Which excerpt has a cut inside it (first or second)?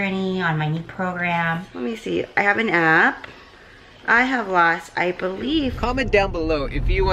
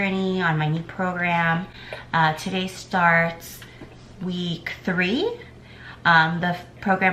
first